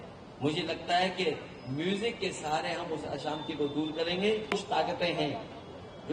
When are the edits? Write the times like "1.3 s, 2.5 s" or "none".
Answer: 4.5 s